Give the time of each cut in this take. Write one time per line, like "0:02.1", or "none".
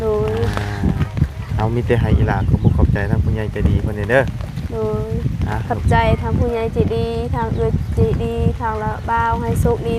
none